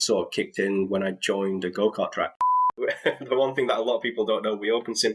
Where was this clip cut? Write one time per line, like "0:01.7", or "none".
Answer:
0:02.6